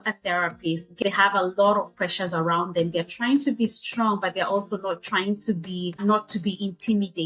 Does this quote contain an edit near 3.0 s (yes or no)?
no